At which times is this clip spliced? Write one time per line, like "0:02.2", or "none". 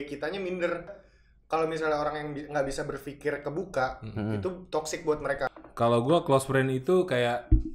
0:01.0
0:05.5